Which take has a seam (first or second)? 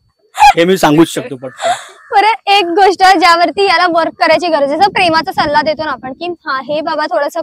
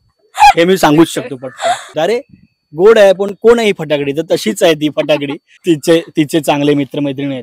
second